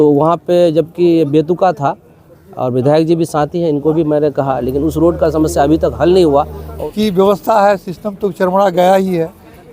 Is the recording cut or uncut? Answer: cut